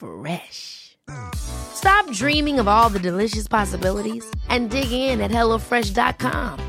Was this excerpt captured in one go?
yes; 0 cuts

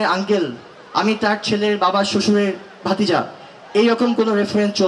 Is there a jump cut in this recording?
no; 0 cuts

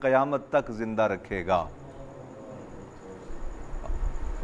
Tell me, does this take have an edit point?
no; 0 cuts

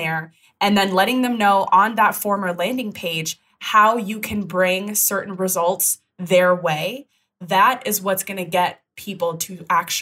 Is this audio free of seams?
yes; 0 cuts

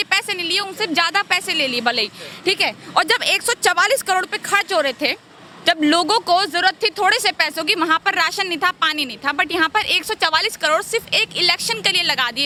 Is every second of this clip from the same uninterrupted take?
yes; 0 cuts

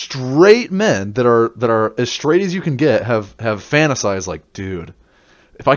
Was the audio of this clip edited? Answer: no; 0 cuts

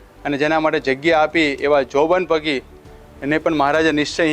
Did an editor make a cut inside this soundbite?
no; 0 cuts

